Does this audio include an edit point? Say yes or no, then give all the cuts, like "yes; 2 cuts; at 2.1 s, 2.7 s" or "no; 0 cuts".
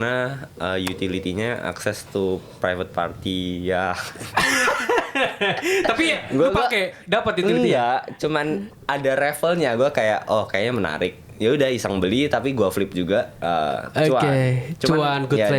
no; 0 cuts